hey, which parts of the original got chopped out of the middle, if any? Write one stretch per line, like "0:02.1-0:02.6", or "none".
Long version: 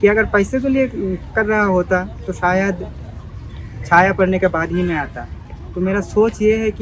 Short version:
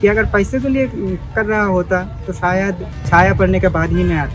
0:02.9-0:03.7